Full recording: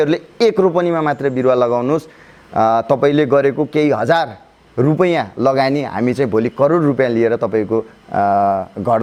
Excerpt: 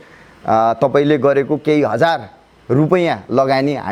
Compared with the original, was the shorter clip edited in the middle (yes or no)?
no